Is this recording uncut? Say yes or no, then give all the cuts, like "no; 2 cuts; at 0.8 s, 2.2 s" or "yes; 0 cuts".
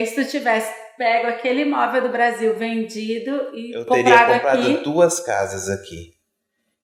yes; 0 cuts